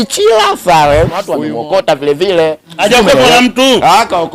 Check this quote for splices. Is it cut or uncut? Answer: cut